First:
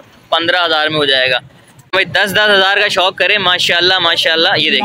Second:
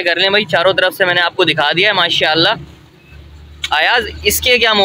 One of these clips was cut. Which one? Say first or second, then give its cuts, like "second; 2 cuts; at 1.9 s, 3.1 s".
first; 1 cut; at 1.9 s